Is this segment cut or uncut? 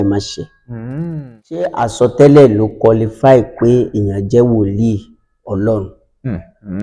cut